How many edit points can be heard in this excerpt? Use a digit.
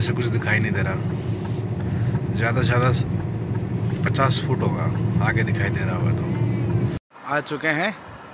1